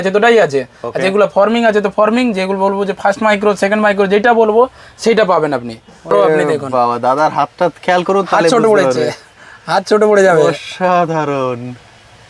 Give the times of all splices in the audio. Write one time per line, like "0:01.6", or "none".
0:06.1

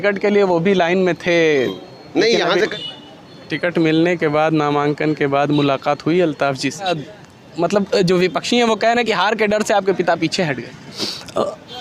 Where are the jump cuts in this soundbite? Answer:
0:02.7
0:06.9
0:10.9

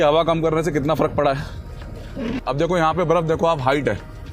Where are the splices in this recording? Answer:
0:02.4

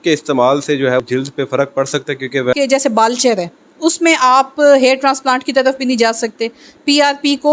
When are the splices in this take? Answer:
0:01.0
0:02.5

